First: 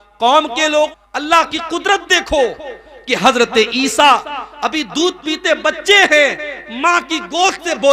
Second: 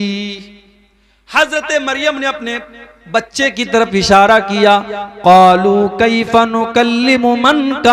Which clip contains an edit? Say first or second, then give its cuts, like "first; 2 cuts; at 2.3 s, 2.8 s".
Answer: first; 1 cut; at 0.9 s